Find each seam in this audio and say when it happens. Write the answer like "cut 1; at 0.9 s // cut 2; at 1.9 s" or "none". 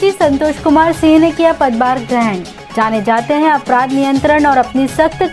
none

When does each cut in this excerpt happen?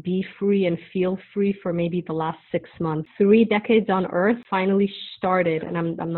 cut 1; at 3.0 s // cut 2; at 4.4 s

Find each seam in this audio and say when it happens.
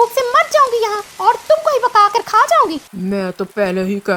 cut 1; at 2.9 s

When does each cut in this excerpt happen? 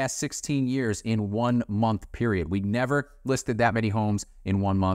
none

